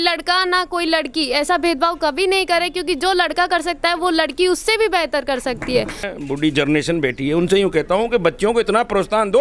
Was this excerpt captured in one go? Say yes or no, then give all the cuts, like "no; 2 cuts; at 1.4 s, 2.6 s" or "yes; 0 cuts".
no; 1 cut; at 6.0 s